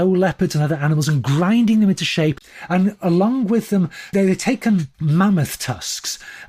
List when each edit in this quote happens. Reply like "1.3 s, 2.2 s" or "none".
2.4 s, 4.1 s, 4.9 s